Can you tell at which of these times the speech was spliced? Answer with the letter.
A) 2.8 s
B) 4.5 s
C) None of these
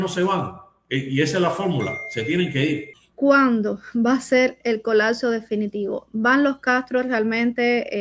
A